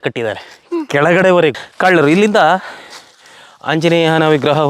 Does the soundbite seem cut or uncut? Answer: cut